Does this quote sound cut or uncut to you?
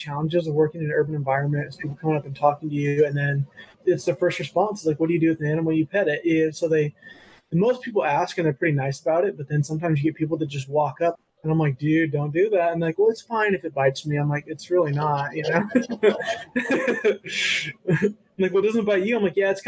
cut